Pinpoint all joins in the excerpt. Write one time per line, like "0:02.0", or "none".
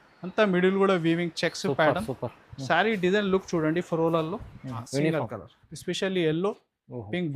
0:04.8